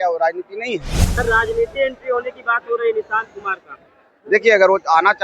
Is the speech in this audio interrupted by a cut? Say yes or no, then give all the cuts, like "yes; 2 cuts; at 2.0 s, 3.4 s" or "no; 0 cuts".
yes; 1 cut; at 1.0 s